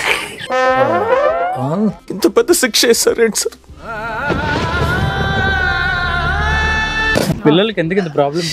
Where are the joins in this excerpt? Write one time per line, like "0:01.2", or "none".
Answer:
0:07.4